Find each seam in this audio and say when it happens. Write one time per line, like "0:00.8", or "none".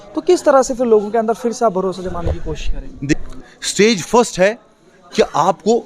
0:03.1